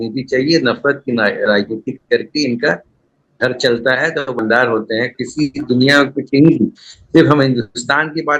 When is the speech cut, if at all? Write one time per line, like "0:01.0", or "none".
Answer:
0:04.4